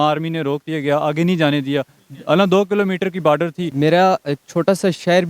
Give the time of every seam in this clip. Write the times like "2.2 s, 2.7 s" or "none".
3.7 s